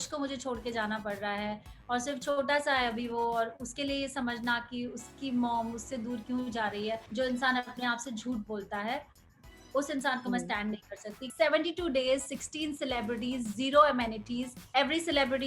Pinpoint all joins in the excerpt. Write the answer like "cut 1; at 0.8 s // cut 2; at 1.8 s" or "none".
cut 1; at 7.1 s // cut 2; at 11.2 s // cut 3; at 14.6 s